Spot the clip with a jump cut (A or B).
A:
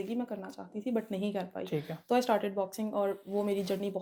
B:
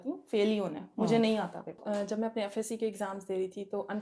B